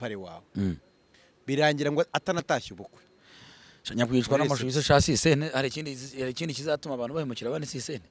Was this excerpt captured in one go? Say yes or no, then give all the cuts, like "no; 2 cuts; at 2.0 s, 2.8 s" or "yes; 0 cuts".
yes; 0 cuts